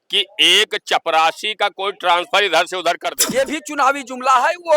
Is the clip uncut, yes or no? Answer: no